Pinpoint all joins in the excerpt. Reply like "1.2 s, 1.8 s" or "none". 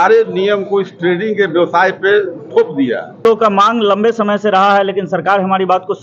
3.2 s